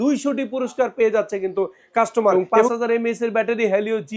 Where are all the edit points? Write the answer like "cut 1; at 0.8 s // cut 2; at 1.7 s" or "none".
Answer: cut 1; at 2.7 s